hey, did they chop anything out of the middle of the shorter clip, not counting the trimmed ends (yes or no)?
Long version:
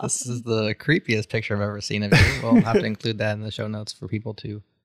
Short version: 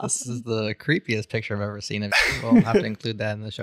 no